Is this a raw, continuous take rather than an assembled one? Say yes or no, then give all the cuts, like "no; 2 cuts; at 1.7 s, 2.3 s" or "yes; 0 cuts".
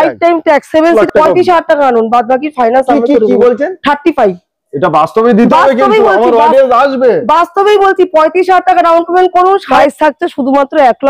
no; 2 cuts; at 1.1 s, 9.7 s